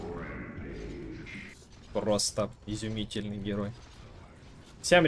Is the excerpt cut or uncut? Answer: uncut